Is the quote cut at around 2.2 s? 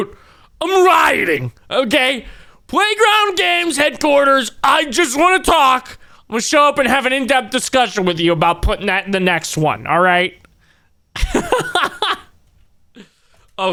no; 0 cuts

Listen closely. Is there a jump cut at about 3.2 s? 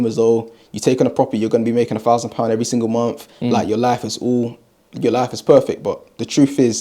no; 0 cuts

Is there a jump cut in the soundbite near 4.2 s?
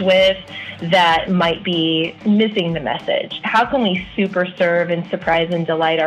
no; 1 cut; at 2.1 s

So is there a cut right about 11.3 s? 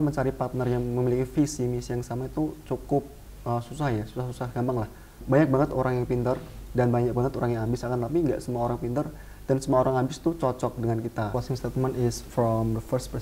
yes; 2 cuts; at 5.2 s, 11.3 s

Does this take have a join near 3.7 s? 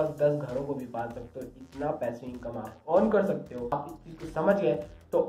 yes; 1 cut; at 3.7 s

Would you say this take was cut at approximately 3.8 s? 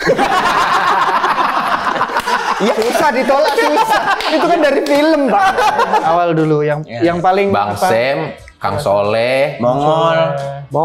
no; 1 cut; at 6.0 s

